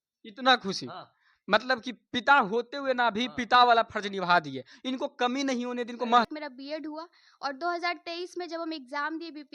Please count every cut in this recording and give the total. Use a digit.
1